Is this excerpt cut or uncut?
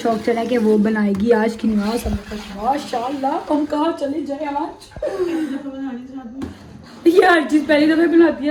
uncut